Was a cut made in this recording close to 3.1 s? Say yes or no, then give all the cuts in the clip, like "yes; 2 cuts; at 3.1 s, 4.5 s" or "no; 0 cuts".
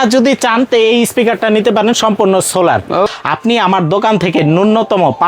yes; 1 cut; at 3.1 s